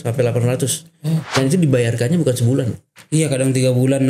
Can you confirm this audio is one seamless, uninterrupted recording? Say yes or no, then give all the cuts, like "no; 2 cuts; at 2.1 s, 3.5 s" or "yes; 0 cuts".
no; 1 cut; at 1.3 s